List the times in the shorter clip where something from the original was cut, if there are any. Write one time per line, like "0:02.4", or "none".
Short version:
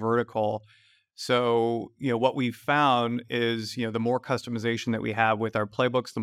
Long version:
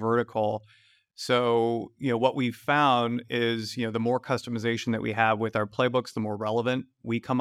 none